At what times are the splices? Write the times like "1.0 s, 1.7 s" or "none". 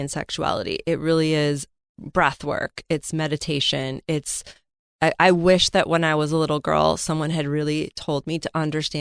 none